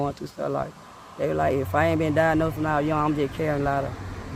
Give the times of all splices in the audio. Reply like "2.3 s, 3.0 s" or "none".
none